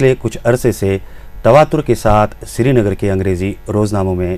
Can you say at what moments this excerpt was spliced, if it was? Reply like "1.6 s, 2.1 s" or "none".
3.4 s